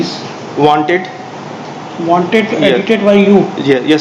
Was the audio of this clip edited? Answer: no; 0 cuts

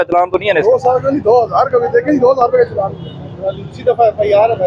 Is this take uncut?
yes; 0 cuts

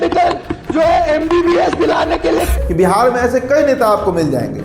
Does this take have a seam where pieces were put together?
yes; 1 cut; at 2.5 s

